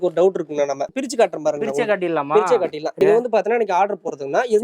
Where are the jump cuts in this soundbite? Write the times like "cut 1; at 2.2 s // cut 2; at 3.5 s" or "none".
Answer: cut 1; at 0.9 s // cut 2; at 2.9 s

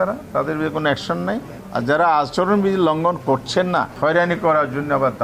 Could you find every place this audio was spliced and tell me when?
cut 1; at 1.6 s // cut 2; at 3.9 s

